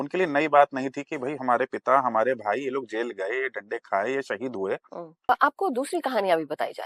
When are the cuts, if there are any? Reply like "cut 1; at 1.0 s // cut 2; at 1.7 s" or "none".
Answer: cut 1; at 5.3 s

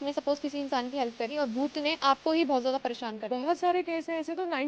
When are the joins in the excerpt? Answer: none

